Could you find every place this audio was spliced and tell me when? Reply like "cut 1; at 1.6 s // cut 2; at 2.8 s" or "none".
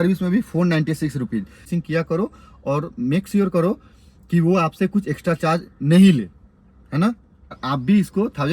cut 1; at 1.7 s // cut 2; at 7.5 s